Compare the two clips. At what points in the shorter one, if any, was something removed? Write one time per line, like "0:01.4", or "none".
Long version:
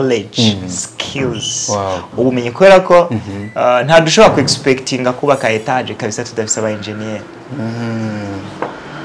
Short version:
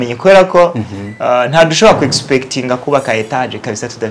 none